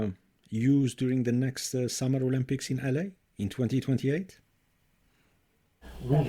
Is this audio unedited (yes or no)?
yes